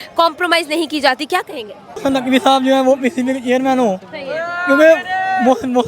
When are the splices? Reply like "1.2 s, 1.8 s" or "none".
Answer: 2.0 s